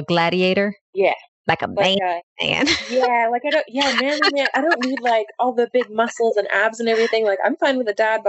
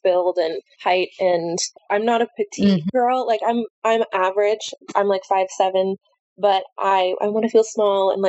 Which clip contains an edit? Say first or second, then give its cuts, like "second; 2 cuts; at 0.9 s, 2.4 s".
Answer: second; 1 cut; at 1.7 s